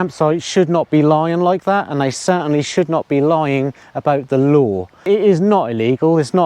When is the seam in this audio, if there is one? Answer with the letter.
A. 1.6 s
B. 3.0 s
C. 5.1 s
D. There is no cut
C